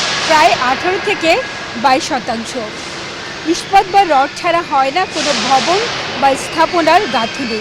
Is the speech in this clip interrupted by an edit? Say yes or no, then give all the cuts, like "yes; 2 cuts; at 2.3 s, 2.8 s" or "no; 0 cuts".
no; 0 cuts